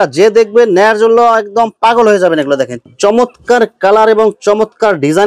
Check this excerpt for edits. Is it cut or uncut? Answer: cut